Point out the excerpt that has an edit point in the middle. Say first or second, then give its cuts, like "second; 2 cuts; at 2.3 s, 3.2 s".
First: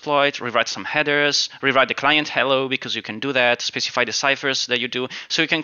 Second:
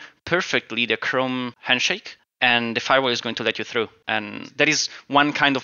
second; 2 cuts; at 1.7 s, 4.0 s